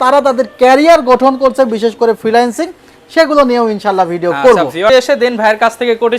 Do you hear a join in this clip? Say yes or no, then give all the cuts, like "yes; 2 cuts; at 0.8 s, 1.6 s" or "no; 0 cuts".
yes; 1 cut; at 4.9 s